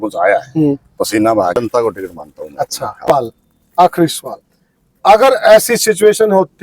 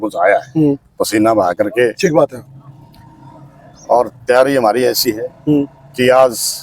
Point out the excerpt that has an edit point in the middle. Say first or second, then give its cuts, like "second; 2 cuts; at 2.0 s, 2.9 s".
first; 2 cuts; at 1.6 s, 3.1 s